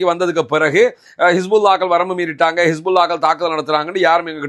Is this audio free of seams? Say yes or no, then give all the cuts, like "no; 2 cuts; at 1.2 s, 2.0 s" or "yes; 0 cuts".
yes; 0 cuts